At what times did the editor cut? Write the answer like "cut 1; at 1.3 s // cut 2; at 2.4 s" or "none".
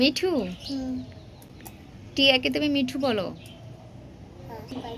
none